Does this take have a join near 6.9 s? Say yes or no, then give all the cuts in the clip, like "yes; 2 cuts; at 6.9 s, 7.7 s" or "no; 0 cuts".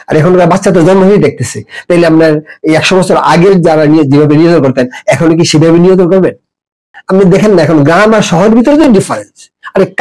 yes; 1 cut; at 6.9 s